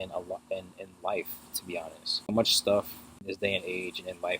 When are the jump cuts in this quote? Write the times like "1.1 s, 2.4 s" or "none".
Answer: 2.3 s, 3.2 s